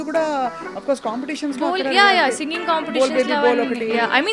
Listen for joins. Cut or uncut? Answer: uncut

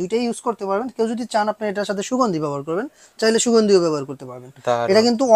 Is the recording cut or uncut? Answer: uncut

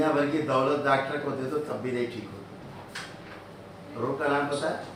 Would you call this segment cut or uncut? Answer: uncut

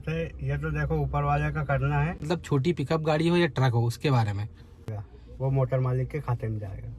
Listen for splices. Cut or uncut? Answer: cut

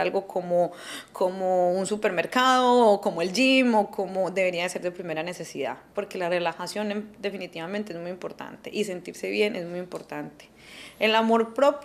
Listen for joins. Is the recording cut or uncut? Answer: uncut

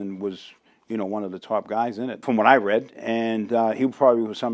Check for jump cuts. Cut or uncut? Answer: cut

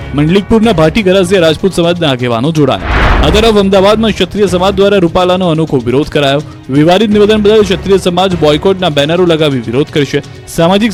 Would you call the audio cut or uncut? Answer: uncut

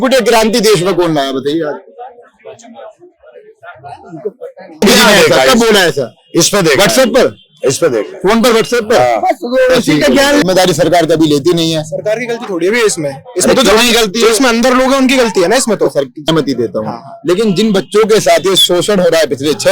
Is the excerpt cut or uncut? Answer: cut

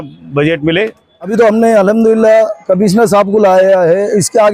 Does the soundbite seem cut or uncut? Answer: cut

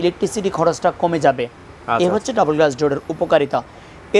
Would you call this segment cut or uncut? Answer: uncut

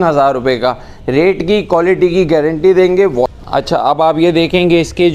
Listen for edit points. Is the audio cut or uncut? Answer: cut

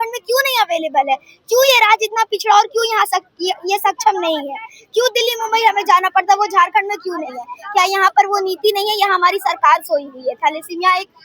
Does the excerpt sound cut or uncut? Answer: uncut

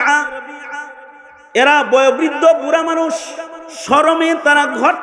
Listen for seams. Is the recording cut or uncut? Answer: uncut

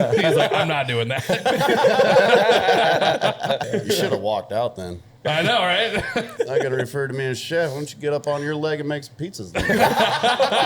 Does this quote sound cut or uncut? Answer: cut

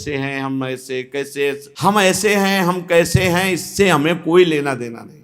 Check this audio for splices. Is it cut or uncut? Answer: cut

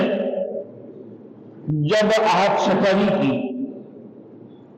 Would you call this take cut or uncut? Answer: uncut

